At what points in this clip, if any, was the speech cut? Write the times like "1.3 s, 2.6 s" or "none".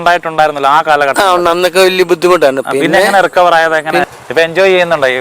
4.0 s

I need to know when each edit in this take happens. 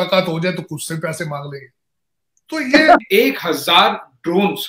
3.0 s

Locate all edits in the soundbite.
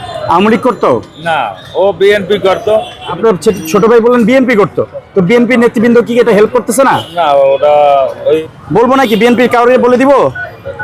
3.2 s, 8.4 s

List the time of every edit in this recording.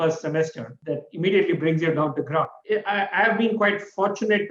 2.6 s

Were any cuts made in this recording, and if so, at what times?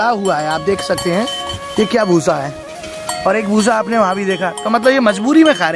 none

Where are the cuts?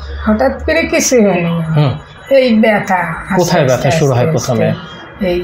none

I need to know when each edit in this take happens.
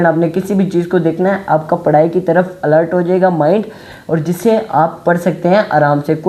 none

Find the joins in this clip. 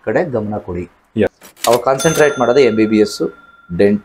1.4 s

